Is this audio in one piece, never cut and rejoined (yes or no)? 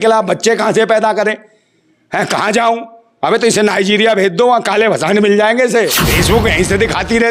no